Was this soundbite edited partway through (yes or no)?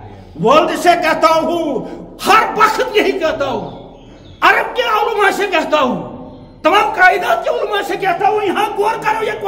no